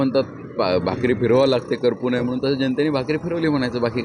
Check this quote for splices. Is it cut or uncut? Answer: uncut